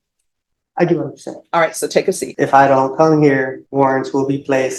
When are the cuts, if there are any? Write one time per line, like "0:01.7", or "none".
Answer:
0:02.3
0:03.6